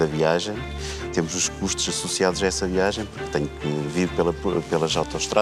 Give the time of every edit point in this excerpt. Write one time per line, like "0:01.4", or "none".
none